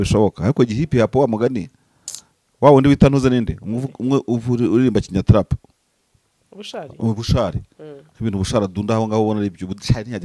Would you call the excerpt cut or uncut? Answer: uncut